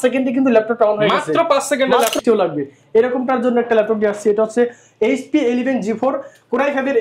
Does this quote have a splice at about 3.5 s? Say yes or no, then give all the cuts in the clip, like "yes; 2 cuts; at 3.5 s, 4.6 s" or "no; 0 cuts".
no; 1 cut; at 2.2 s